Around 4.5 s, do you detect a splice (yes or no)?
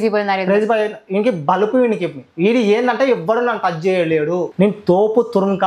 yes